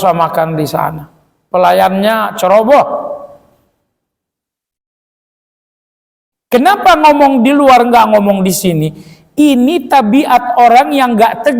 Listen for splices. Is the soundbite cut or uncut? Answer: uncut